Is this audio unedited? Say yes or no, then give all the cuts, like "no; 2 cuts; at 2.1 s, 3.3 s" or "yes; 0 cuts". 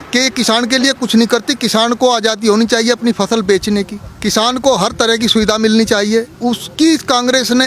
no; 2 cuts; at 4.0 s, 6.3 s